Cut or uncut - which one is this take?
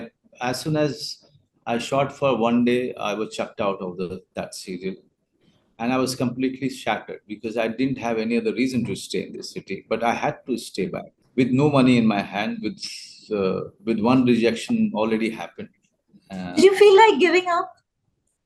uncut